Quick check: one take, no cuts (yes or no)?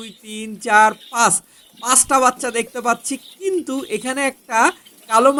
yes